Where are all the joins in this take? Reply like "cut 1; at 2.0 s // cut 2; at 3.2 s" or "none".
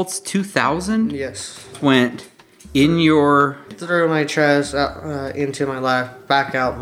cut 1; at 1.7 s // cut 2; at 3.8 s